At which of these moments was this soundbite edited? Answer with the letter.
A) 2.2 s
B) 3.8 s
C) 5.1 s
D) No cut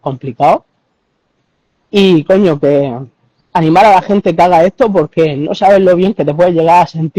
D